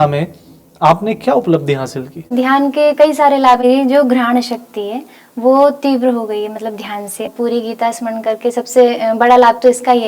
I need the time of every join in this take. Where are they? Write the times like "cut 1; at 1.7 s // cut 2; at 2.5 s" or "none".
cut 1; at 2.3 s // cut 2; at 3.6 s // cut 3; at 7.3 s

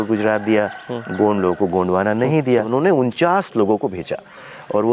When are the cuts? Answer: cut 1; at 2.7 s

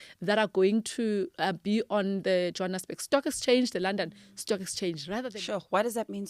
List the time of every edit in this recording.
cut 1; at 5.3 s

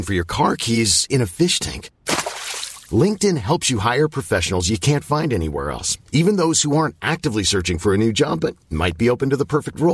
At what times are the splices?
none

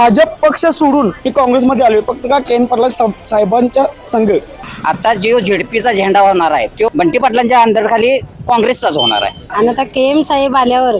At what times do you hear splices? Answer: cut 1; at 1.2 s // cut 2; at 4.7 s // cut 3; at 6.8 s // cut 4; at 9.4 s

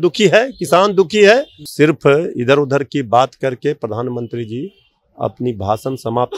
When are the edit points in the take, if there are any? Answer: cut 1; at 1.6 s

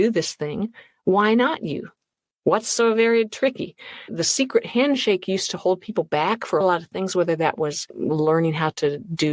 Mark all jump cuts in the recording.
cut 1; at 4.1 s // cut 2; at 6.6 s

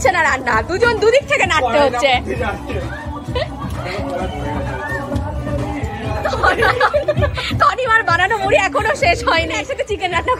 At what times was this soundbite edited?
none

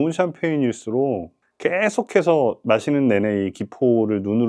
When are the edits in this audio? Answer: none

